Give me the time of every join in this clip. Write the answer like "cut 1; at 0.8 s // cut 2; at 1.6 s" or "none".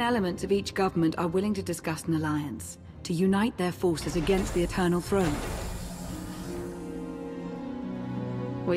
cut 1; at 6.4 s